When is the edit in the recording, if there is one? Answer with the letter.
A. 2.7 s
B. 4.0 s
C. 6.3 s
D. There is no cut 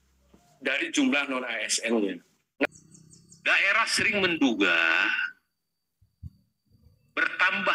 A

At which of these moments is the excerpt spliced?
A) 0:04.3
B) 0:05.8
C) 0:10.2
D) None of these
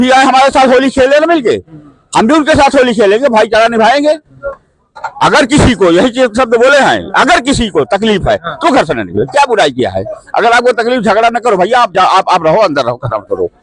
D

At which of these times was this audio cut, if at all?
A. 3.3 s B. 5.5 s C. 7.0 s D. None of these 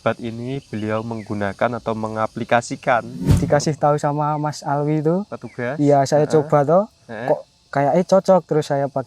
A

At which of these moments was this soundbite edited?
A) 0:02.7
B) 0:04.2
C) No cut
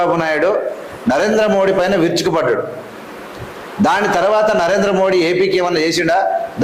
C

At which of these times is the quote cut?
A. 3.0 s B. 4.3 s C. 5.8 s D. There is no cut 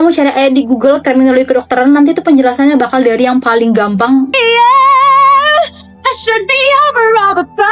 B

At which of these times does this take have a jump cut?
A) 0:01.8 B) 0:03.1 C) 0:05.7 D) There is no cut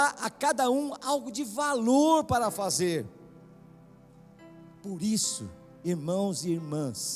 D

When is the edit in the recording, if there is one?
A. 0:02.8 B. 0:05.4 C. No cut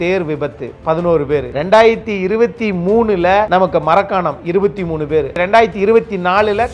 B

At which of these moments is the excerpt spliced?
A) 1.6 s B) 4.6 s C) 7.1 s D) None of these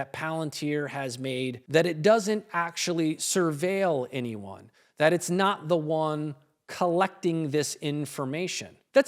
A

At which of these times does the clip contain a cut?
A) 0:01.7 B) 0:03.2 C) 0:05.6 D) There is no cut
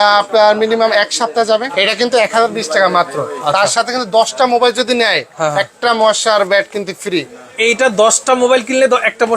A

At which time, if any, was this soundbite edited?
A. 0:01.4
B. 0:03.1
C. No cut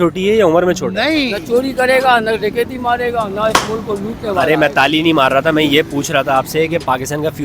A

